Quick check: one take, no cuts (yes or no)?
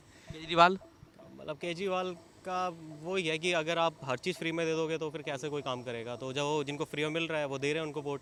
yes